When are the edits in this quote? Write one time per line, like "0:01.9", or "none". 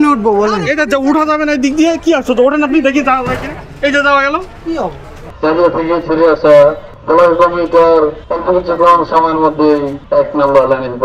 0:05.4
0:06.9
0:08.3
0:10.0